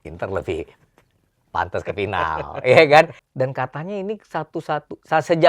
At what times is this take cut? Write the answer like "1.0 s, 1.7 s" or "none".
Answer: 3.2 s